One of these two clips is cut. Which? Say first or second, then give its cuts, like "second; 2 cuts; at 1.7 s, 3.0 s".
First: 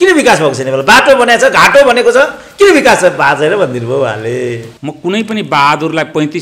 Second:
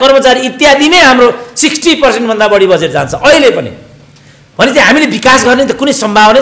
first; 1 cut; at 4.7 s